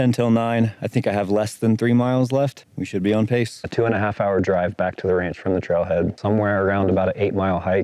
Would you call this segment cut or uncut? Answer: cut